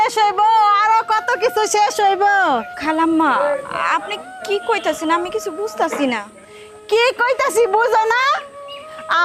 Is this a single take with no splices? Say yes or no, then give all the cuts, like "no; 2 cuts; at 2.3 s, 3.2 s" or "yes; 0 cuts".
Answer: no; 1 cut; at 2.8 s